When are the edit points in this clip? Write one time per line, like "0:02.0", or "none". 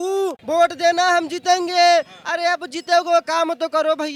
none

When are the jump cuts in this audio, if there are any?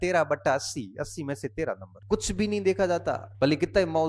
0:01.9
0:03.3

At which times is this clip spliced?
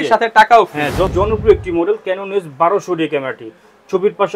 0:01.1

